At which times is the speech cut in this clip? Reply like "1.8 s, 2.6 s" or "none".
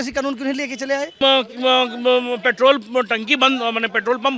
1.2 s